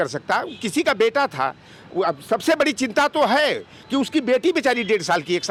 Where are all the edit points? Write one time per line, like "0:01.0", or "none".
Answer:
none